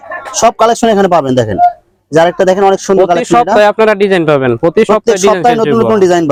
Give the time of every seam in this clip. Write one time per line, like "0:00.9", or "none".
none